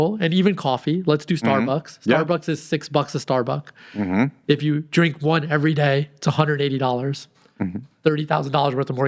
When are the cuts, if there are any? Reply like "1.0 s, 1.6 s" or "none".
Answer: none